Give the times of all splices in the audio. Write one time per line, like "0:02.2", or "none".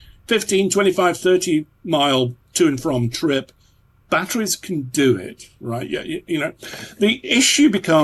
none